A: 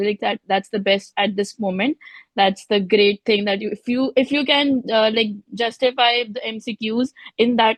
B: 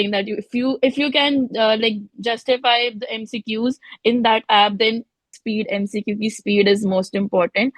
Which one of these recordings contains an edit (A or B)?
B